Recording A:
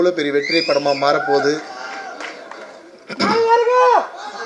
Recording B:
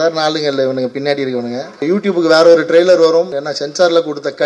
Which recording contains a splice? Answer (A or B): B